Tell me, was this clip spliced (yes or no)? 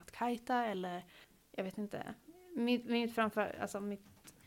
no